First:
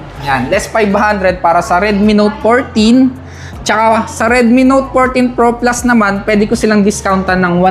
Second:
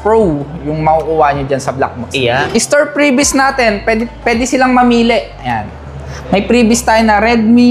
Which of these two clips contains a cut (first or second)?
second